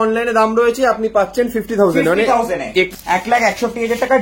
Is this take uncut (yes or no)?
no